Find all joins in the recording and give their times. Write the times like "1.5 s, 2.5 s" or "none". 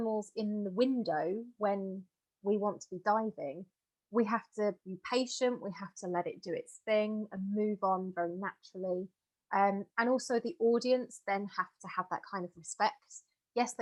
none

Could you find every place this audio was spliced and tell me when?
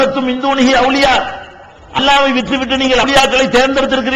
3.0 s

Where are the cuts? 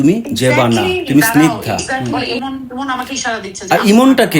2.2 s

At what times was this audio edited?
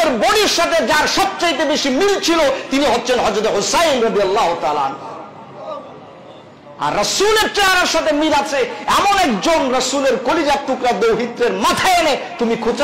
none

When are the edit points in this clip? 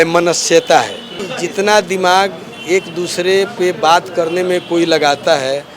1.3 s

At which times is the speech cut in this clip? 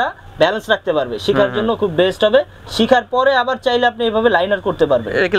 none

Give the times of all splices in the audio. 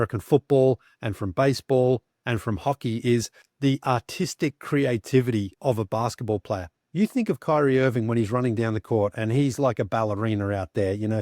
3.4 s, 5.5 s

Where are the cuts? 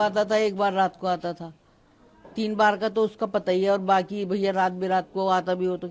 none

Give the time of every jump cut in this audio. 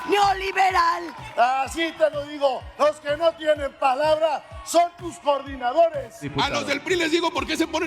1.1 s, 6.3 s

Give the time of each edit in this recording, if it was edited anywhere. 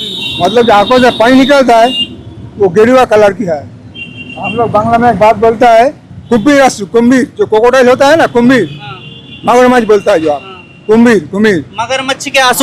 none

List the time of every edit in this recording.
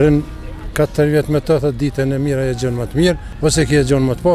3.3 s

